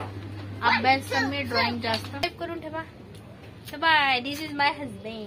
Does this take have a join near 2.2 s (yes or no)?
yes